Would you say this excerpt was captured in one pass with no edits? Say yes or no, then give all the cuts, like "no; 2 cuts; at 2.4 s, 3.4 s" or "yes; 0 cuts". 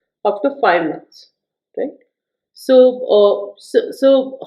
yes; 0 cuts